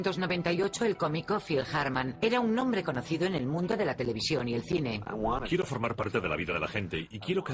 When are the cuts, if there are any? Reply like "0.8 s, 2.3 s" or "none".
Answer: none